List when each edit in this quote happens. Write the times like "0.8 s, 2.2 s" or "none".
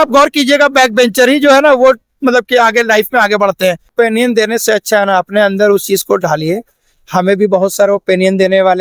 3.8 s